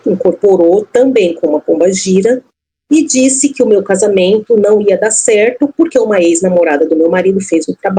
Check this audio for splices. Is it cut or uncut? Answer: uncut